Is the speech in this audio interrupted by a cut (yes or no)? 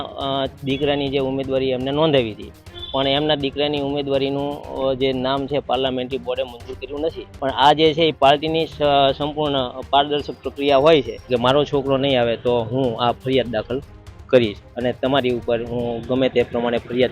yes